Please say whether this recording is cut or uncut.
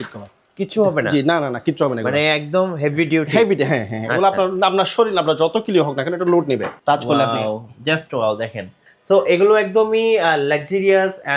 cut